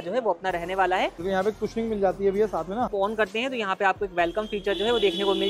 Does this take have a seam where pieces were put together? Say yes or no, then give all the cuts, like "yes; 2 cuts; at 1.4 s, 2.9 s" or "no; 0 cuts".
yes; 2 cuts; at 1.2 s, 2.9 s